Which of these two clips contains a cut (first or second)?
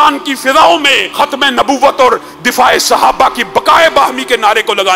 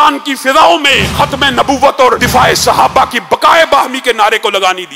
second